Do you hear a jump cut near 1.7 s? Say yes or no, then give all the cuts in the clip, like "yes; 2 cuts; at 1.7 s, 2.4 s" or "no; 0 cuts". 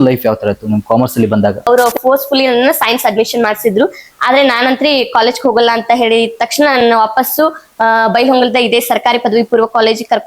yes; 1 cut; at 1.7 s